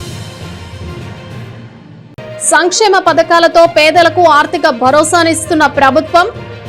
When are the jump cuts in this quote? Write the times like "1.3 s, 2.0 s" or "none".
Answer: 1.6 s